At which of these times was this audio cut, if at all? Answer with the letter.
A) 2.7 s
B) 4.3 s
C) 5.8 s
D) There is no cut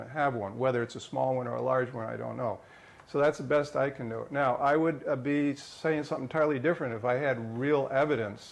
D